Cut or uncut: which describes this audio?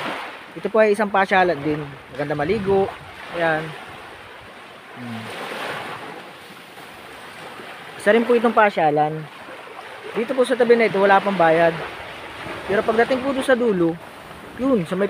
uncut